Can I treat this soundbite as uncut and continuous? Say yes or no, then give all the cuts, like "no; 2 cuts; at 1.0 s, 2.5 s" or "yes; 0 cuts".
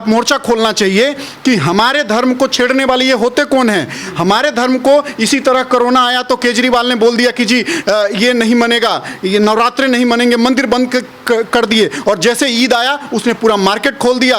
yes; 0 cuts